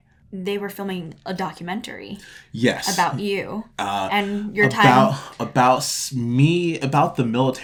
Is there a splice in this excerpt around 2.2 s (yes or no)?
no